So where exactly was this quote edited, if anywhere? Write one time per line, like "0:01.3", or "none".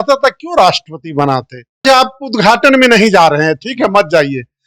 0:01.8